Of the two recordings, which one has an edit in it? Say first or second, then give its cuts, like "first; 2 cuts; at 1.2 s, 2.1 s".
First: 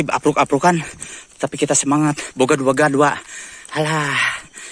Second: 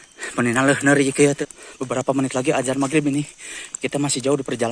second; 1 cut; at 1.4 s